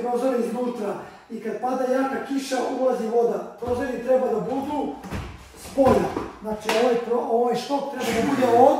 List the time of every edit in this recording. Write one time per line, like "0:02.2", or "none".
none